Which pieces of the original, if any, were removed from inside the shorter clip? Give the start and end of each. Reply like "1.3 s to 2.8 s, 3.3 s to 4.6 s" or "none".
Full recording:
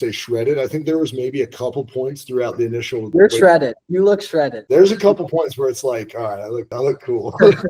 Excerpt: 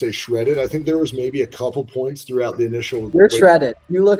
none